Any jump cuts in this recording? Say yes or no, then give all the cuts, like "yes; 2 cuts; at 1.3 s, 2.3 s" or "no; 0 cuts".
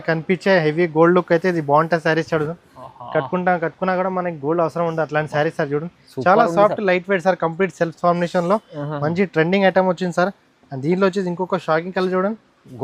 no; 0 cuts